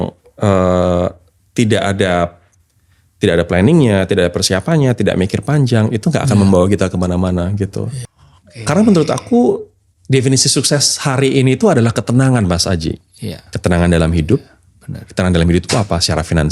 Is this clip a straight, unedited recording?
no; 1 cut; at 7.9 s

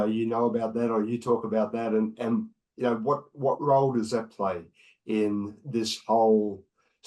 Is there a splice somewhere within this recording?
no; 0 cuts

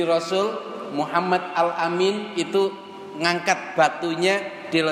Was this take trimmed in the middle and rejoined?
no; 0 cuts

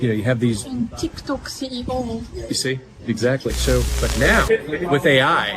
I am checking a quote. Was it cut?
yes; 1 cut; at 4.0 s

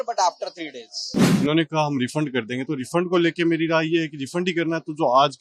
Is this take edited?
yes; 1 cut; at 1.3 s

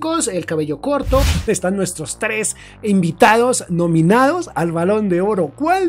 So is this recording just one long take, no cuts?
no; 1 cut; at 1.3 s

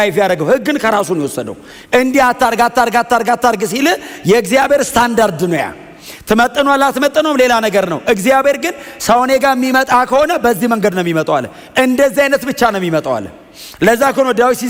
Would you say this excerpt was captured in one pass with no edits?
yes; 0 cuts

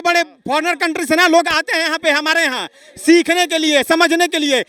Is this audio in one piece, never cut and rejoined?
yes; 0 cuts

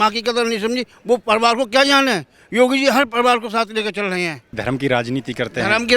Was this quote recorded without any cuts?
no; 1 cut; at 4.6 s

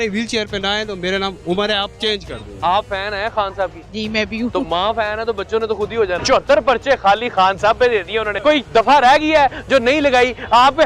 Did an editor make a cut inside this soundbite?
yes; 3 cuts; at 2.5 s, 6.2 s, 8.3 s

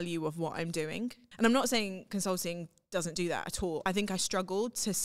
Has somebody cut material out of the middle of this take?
yes; 2 cuts; at 1.2 s, 3.8 s

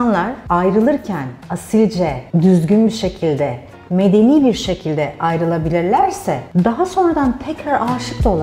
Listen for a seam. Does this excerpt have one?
no; 0 cuts

